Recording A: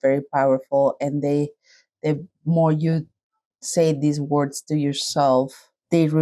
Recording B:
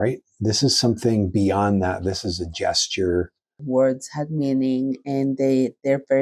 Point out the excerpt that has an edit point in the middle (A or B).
B